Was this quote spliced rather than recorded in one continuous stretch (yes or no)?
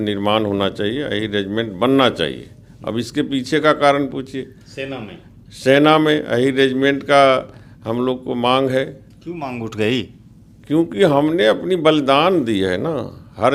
no